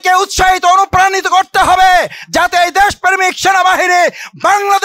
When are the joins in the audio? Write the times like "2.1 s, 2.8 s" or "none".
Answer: none